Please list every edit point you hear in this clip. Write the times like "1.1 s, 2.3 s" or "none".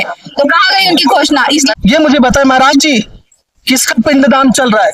1.7 s